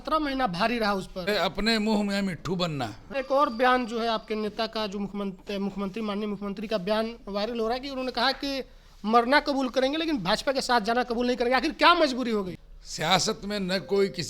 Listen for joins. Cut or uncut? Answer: cut